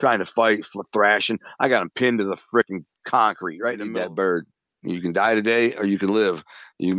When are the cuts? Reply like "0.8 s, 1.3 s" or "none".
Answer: 3.9 s